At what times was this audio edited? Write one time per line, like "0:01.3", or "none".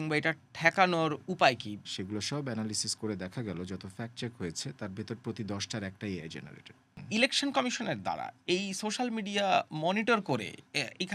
0:01.7
0:07.0